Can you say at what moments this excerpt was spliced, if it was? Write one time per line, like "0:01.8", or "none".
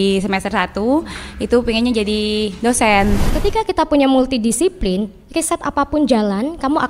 0:03.3